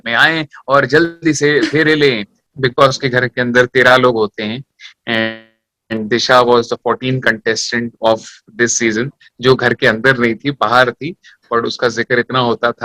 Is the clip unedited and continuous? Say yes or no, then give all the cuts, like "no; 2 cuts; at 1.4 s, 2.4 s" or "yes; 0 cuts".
no; 1 cut; at 2.3 s